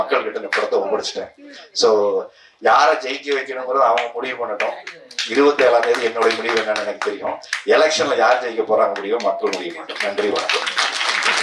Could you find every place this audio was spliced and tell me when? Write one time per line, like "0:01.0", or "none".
none